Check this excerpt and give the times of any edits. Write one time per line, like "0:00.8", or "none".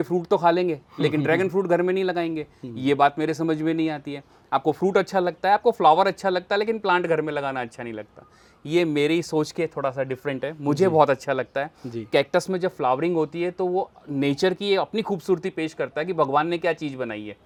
none

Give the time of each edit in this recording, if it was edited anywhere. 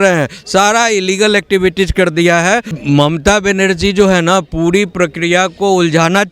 0:02.8

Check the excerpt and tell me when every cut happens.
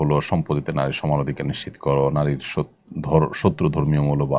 none

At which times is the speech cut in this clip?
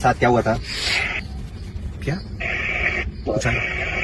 0:01.2

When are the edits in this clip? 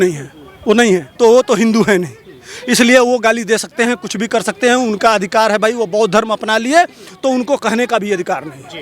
0:01.1

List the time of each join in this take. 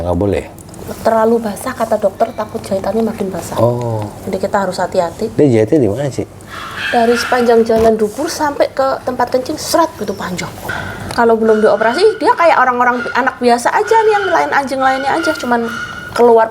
0:10.6

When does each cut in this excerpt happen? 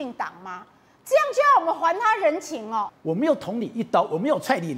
0:02.9

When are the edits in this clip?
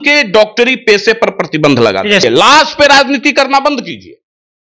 0:02.2

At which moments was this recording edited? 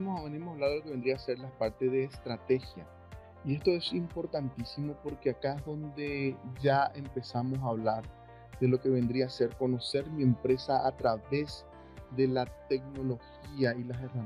none

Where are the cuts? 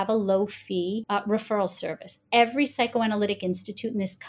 0:01.0

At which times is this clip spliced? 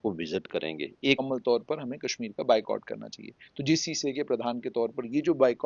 0:01.2

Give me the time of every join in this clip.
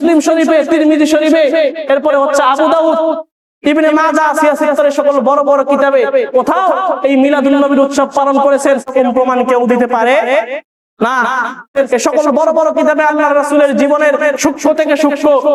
0:08.9
0:11.7

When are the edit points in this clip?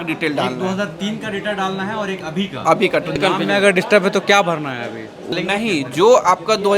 0:03.2
0:05.3

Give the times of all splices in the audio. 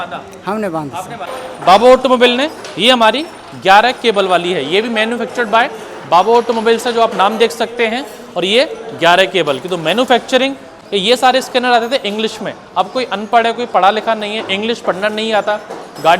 0:01.4
0:10.7

